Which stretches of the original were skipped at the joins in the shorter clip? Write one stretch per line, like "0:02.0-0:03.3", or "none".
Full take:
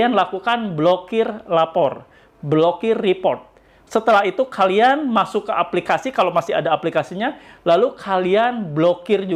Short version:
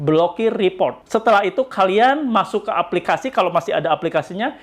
0:03.4-0:03.8